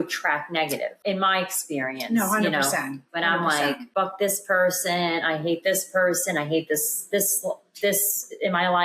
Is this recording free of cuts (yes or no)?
no